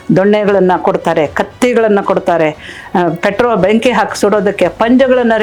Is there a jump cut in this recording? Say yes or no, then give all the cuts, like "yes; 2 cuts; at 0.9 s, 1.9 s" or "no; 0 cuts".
no; 0 cuts